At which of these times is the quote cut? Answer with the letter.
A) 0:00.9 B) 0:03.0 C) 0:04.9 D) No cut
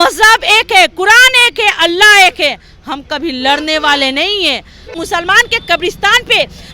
C